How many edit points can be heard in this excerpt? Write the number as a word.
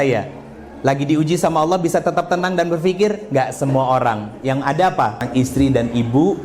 one